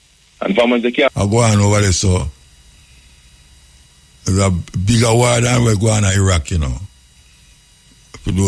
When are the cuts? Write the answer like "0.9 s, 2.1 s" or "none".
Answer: 1.1 s